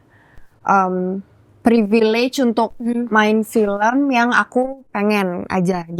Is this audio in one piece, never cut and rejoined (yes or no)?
yes